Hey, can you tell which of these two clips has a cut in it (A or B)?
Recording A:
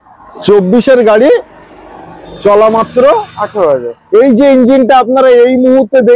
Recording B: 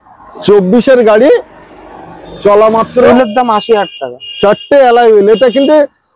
B